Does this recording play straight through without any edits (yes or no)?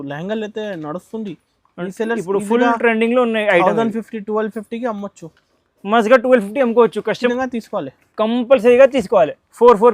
no